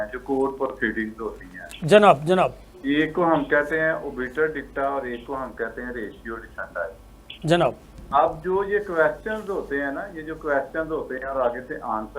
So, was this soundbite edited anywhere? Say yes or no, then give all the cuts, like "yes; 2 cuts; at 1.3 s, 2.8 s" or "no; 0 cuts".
no; 0 cuts